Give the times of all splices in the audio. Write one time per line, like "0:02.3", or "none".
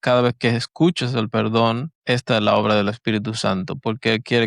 0:01.9